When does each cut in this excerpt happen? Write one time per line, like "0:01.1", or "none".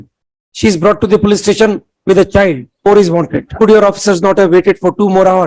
0:02.7
0:03.5